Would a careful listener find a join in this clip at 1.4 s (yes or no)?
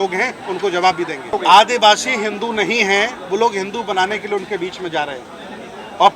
yes